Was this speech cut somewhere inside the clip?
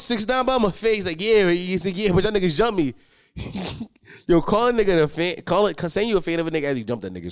no; 0 cuts

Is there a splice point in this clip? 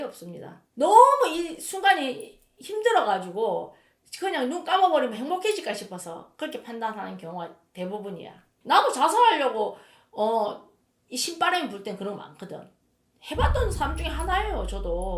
yes; 1 cut; at 8.5 s

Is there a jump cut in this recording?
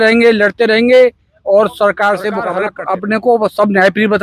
yes; 1 cut; at 2.7 s

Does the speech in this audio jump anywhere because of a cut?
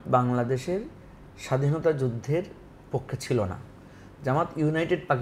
no; 0 cuts

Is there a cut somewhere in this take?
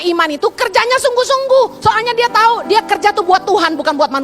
no; 0 cuts

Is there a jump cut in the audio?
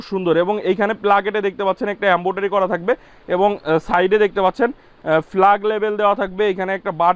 no; 0 cuts

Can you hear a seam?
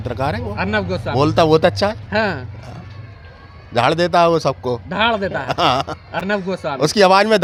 no; 0 cuts

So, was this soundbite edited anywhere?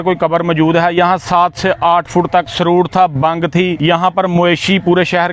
yes; 2 cuts; at 2.5 s, 3.8 s

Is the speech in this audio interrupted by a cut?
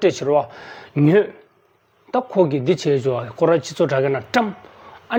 no; 0 cuts

